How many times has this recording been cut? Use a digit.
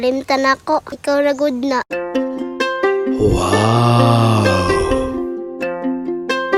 0